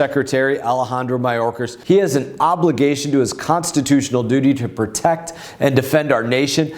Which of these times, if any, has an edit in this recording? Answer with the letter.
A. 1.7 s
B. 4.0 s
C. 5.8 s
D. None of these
A